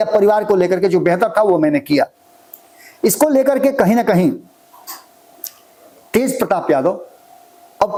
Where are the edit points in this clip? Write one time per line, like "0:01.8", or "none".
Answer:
none

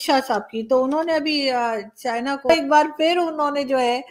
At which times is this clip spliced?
0:02.5

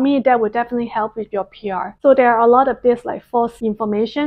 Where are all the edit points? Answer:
0:01.9

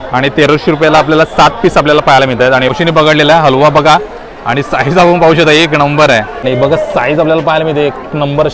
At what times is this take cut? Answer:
0:02.7
0:06.4

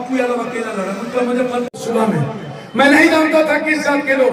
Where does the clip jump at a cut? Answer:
0:01.8

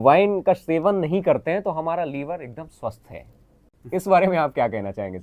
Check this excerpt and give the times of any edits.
none

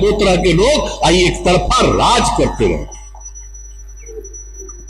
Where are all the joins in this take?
none

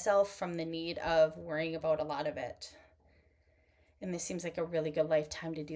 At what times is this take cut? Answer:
none

